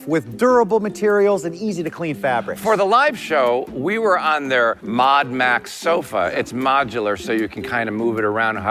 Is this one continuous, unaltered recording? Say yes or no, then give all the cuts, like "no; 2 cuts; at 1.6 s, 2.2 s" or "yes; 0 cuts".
yes; 0 cuts